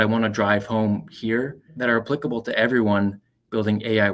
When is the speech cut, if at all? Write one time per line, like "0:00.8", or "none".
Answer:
0:01.7

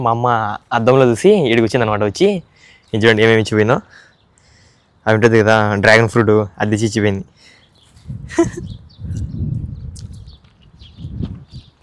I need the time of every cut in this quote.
none

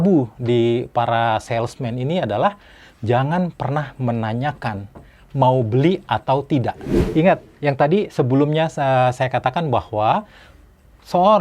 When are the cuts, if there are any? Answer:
0:06.9

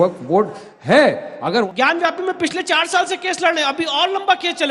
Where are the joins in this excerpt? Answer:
0:01.7

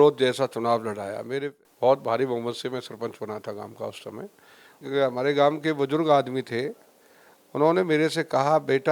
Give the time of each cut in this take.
0:01.5
0:04.8

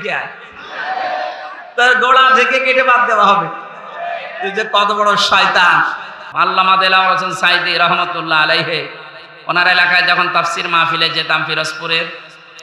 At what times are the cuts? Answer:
0:06.2

